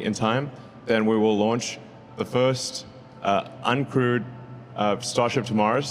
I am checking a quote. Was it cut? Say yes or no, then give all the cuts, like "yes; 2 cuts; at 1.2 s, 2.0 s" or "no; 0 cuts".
no; 0 cuts